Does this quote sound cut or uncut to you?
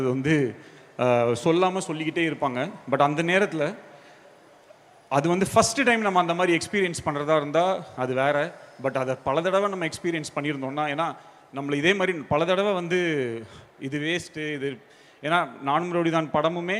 uncut